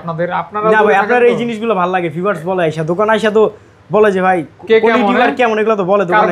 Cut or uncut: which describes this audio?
uncut